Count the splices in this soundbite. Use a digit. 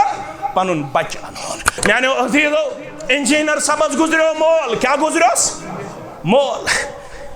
1